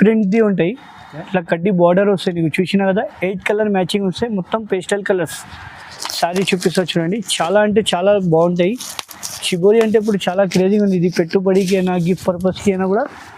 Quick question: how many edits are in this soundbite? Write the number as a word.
zero